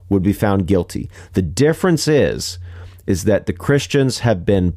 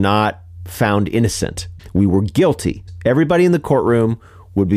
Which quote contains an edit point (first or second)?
second